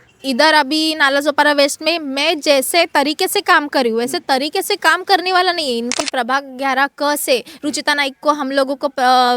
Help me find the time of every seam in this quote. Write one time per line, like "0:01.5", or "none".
0:05.9

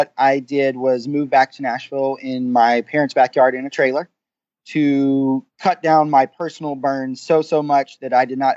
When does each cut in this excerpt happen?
0:05.5

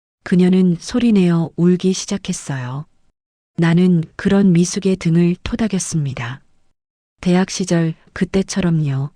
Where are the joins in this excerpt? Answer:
0:08.1

